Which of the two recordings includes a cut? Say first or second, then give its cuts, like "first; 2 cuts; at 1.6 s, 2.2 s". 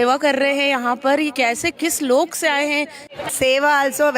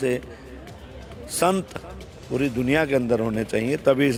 first; 2 cuts; at 1.3 s, 3.2 s